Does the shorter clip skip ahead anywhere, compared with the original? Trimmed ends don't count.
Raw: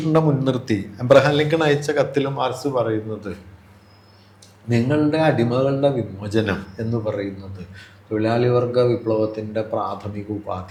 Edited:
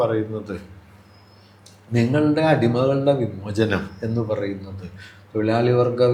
no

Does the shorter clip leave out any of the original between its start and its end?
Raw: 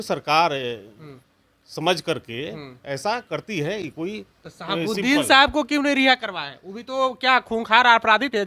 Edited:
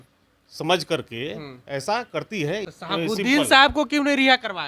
yes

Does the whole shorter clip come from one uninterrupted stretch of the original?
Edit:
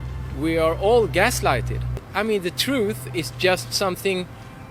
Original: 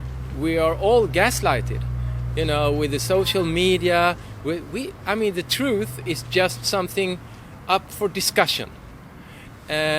no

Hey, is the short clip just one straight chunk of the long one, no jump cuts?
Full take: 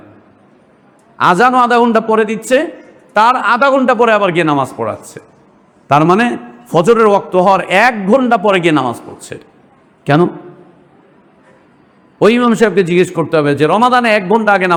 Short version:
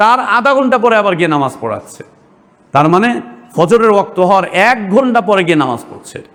yes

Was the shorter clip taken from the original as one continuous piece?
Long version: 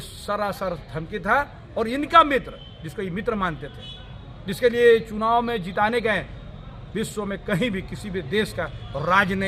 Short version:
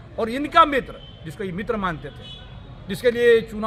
yes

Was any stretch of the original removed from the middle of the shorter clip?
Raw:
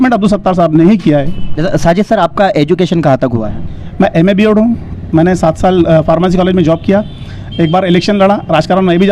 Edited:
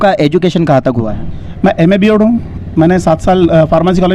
no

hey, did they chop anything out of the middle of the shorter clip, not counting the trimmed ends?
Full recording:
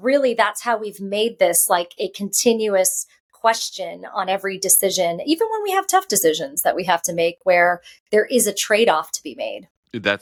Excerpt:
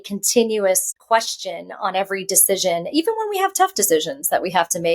yes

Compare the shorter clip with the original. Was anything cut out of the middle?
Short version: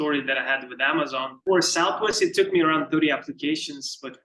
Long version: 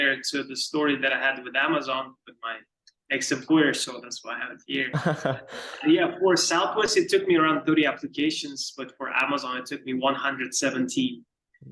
yes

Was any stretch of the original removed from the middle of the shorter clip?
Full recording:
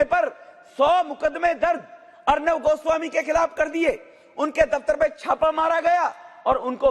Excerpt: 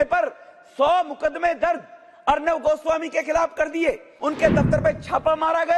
yes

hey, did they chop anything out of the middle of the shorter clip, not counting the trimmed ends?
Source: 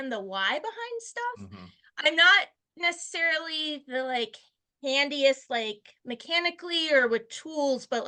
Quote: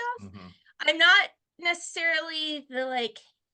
no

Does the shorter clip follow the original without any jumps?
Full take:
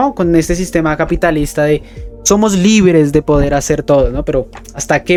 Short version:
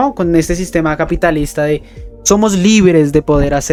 yes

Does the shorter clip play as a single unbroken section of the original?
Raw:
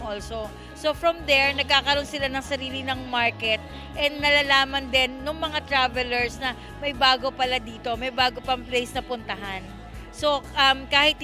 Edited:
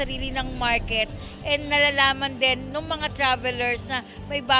yes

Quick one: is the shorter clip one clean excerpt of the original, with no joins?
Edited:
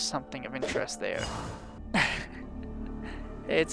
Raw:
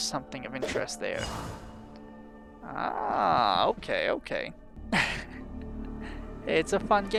no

